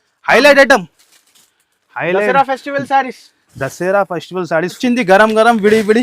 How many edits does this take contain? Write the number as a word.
one